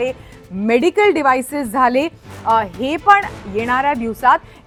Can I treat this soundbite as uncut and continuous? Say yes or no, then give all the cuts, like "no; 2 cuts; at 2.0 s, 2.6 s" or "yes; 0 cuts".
yes; 0 cuts